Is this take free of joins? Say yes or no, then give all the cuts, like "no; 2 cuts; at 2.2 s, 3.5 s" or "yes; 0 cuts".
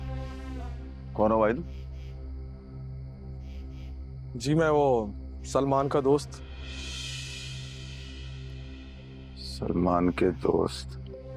yes; 0 cuts